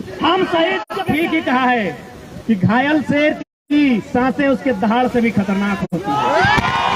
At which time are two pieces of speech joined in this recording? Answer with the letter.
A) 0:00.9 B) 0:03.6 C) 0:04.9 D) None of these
A